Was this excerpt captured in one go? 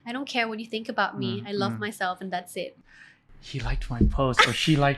no; 1 cut; at 2.8 s

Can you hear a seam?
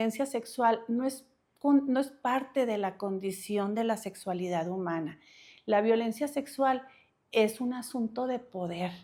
no; 0 cuts

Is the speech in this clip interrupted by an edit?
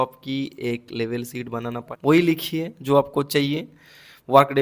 yes; 1 cut; at 1.8 s

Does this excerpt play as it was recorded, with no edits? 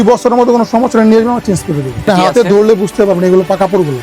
no; 1 cut; at 2.0 s

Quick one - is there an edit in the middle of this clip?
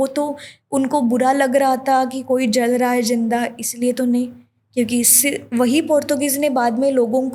no; 0 cuts

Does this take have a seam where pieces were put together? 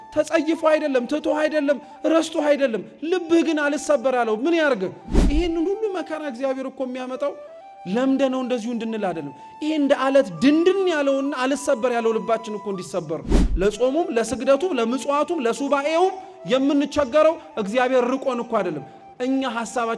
yes; 2 cuts; at 5.2 s, 13.4 s

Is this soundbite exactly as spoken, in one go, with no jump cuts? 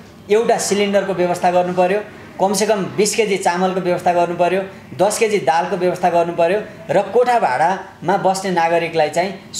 yes; 0 cuts

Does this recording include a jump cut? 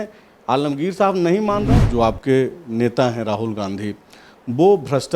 yes; 1 cut; at 1.7 s

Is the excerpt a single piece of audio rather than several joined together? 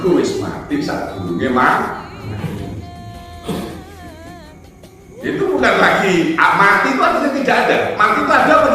no; 1 cut; at 5.0 s

